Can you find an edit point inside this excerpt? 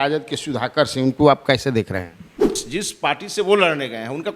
yes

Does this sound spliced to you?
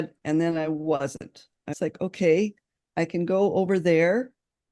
yes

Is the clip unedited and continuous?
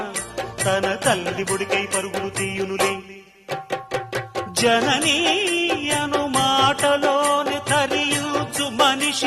yes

